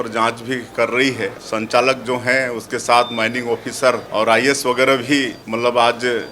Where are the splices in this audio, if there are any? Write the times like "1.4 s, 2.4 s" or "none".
1.4 s, 4.0 s, 5.4 s